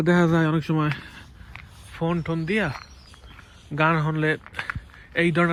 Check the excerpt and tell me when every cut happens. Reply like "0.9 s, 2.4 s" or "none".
none